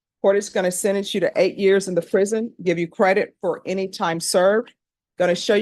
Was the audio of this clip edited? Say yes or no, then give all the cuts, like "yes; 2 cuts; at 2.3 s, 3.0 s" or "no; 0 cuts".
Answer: no; 0 cuts